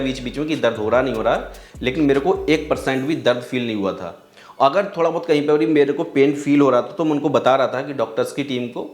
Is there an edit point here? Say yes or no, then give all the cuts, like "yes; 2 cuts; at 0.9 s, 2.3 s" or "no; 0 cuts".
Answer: no; 0 cuts